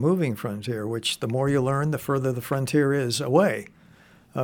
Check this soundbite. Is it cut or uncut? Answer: uncut